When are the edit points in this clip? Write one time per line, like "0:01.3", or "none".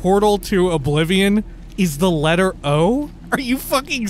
0:01.6
0:03.2